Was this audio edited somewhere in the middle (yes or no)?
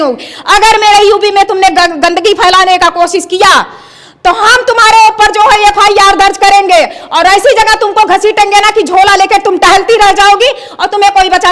no